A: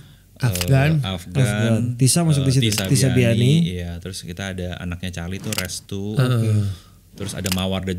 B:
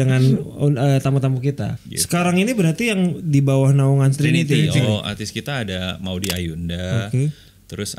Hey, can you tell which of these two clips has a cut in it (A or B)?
B